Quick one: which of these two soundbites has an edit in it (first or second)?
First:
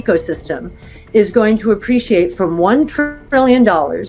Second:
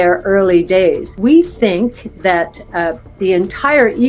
second